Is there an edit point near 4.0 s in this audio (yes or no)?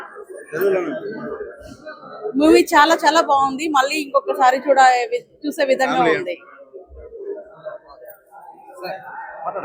yes